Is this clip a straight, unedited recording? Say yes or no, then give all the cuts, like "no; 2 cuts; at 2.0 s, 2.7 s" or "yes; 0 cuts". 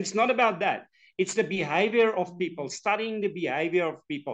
yes; 0 cuts